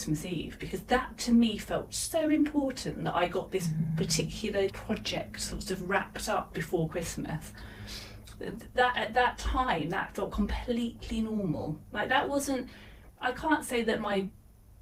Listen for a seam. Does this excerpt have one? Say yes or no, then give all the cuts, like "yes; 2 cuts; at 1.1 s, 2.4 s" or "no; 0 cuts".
no; 0 cuts